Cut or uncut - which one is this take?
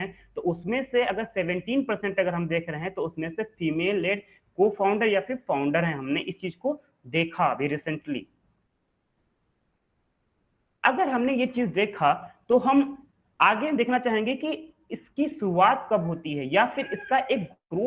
uncut